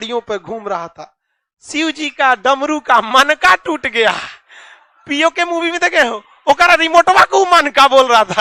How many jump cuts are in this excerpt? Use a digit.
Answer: 0